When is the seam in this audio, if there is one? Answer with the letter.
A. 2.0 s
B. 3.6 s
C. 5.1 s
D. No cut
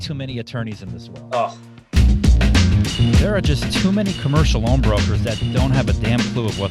A